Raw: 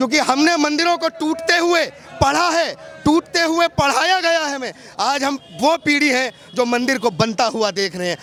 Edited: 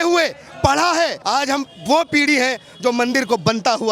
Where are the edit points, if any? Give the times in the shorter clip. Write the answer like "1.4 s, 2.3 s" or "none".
1.2 s